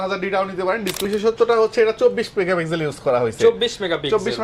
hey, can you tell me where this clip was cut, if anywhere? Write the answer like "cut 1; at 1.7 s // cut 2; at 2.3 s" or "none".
cut 1; at 1.0 s